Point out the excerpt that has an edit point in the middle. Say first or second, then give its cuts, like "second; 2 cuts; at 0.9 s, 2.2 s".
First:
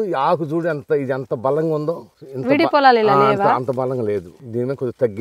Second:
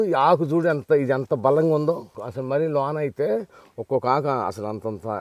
second; 1 cut; at 2.2 s